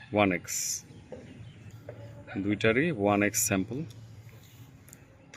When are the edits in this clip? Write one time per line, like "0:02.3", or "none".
0:01.7

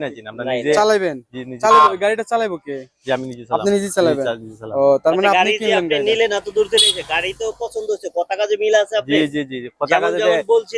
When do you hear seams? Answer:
none

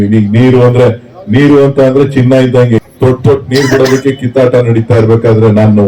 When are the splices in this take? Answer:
0:02.8

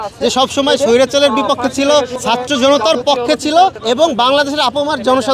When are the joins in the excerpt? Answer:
0:02.1
0:03.8

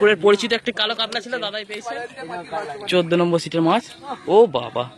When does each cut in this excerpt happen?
0:01.7

